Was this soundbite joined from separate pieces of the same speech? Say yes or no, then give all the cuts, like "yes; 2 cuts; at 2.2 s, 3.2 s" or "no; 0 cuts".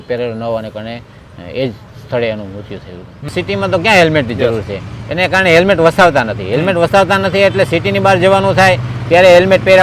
yes; 1 cut; at 3.3 s